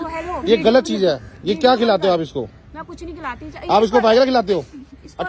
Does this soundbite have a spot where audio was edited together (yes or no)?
no